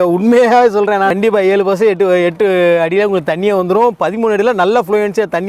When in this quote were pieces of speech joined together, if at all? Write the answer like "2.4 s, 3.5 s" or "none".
1.1 s